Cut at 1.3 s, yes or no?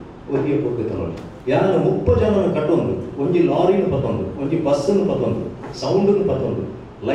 yes